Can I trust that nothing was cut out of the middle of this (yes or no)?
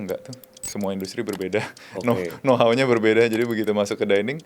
yes